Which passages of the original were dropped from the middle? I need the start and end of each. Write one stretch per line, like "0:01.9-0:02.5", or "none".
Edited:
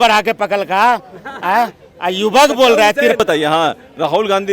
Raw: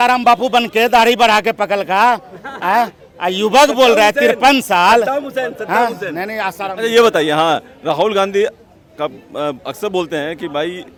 0:04.4-0:07.1